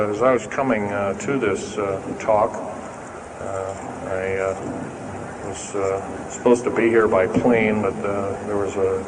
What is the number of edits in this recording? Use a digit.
1